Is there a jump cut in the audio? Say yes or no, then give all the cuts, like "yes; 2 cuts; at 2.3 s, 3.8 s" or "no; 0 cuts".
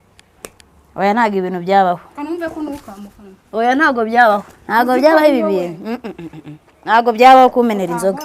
no; 0 cuts